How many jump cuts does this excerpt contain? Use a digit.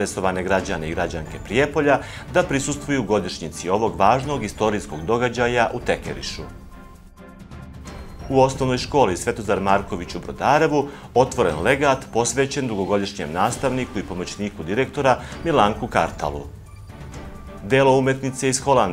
2